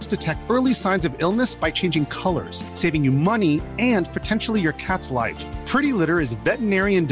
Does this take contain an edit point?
no; 0 cuts

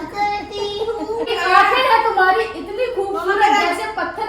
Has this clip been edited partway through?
yes; 1 cut; at 1.3 s

